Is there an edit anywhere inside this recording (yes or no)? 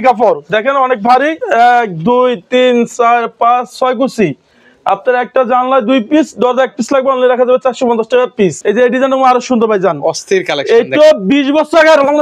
yes